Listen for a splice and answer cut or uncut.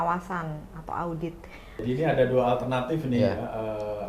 cut